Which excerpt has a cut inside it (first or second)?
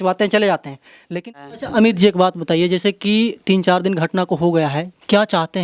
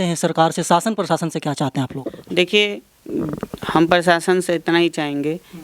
first